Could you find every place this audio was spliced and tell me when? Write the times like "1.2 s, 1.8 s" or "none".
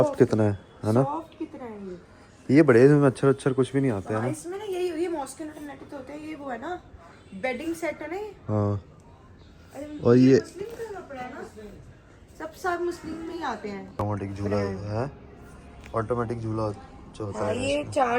none